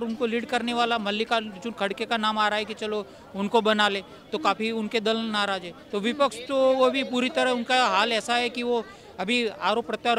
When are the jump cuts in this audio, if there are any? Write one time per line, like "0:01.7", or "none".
none

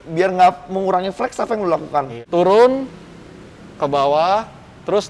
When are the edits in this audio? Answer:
0:02.2

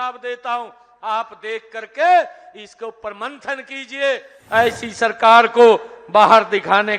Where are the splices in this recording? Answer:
0:04.3

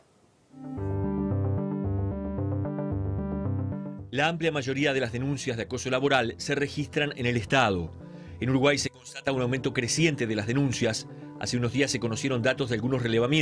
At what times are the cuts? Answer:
none

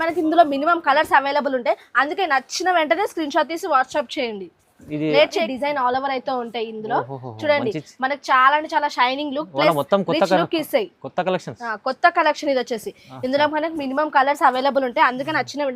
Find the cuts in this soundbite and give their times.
0:05.5

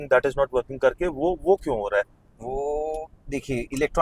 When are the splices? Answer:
none

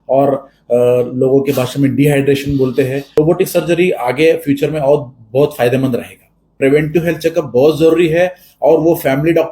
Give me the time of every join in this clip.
0:03.2
0:06.6

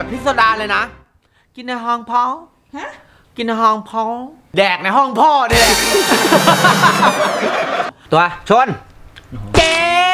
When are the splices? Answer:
0:04.4
0:07.9

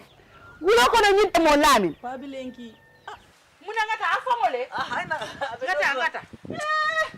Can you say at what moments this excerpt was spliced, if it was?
0:01.3

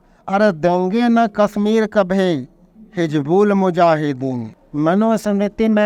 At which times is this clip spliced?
0:04.5

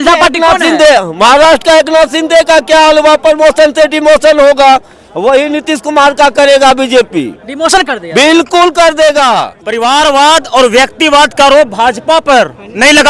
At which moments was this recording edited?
0:09.6

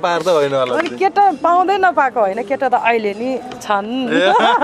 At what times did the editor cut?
none

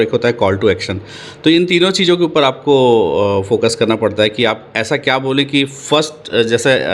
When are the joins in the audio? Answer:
none

